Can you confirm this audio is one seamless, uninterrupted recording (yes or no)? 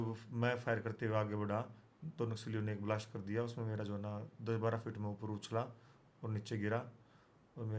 yes